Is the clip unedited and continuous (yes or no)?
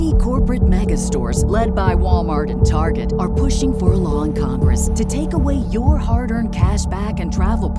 yes